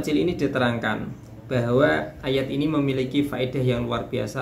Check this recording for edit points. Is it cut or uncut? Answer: uncut